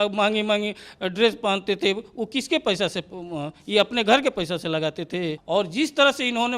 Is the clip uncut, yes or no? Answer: no